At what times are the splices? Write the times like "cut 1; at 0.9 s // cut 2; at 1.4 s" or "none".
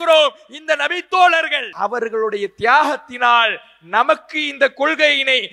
cut 1; at 1.6 s